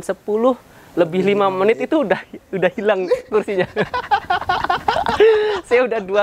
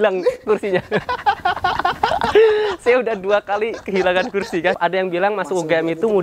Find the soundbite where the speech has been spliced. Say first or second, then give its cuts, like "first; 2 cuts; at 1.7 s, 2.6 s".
second; 1 cut; at 4.8 s